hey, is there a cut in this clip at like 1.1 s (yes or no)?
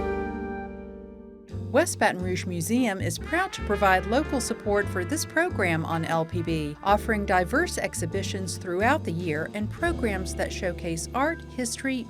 yes